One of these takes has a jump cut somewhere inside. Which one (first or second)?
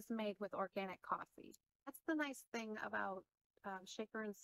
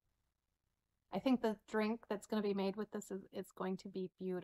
first